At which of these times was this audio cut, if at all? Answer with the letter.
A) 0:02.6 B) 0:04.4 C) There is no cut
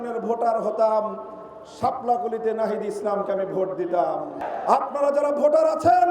B